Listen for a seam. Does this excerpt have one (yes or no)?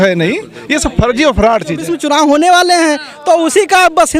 yes